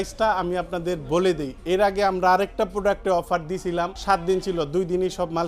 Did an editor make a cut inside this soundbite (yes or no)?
yes